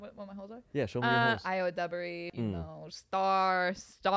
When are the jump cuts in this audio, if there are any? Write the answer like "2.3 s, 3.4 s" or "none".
1.4 s, 2.3 s